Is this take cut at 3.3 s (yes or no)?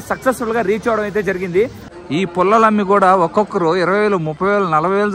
no